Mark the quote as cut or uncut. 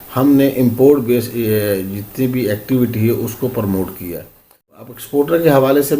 cut